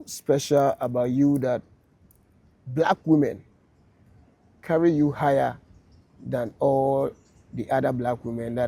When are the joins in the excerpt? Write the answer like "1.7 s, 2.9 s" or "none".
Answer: none